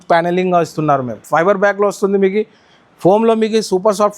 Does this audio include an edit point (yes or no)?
yes